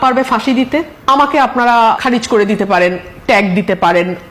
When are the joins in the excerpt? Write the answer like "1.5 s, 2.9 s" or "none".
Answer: 0.9 s, 2.0 s